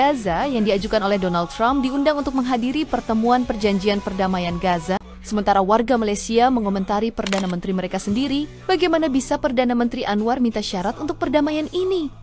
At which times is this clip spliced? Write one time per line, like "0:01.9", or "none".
0:05.1